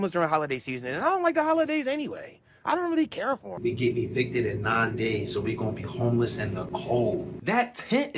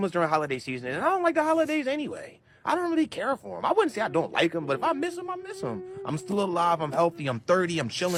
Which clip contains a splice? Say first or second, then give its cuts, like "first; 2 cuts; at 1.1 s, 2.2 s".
first; 2 cuts; at 3.5 s, 7.3 s